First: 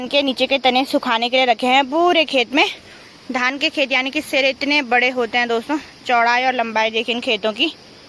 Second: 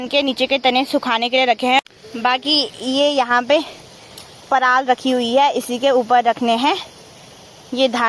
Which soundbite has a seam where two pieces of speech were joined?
second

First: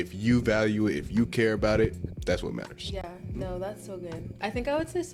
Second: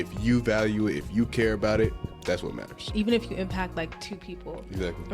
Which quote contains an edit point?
second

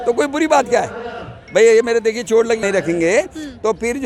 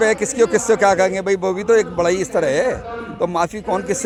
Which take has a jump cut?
first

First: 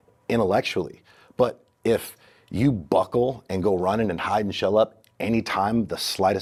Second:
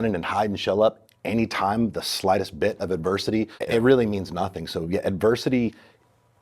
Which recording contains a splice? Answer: second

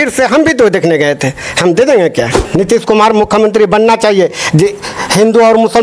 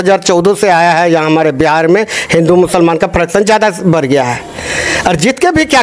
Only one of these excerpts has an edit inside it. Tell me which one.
first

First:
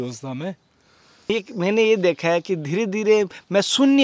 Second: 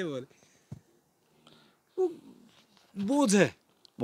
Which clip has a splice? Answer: first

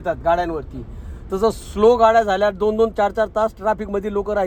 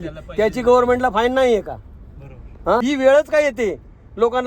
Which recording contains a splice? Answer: second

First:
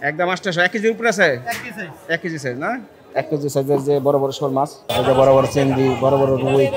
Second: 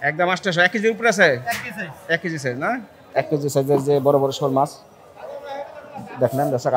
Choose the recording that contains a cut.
first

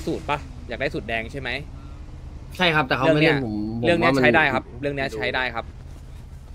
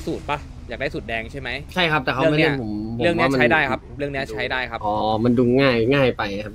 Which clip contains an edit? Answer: second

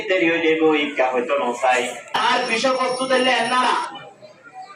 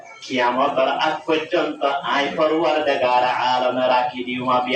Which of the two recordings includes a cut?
first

